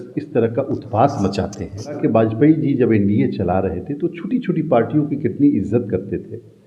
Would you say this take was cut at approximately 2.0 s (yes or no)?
yes